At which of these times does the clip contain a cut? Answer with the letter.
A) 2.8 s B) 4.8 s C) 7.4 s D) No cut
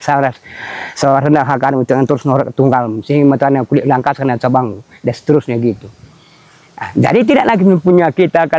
D